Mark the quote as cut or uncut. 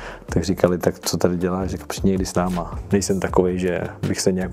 cut